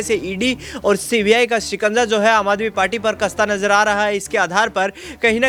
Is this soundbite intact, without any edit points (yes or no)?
yes